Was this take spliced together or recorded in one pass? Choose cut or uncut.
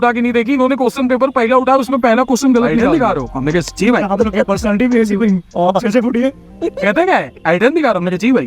cut